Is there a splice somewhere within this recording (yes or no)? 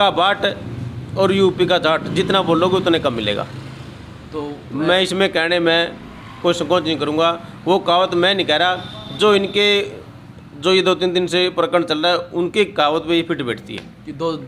no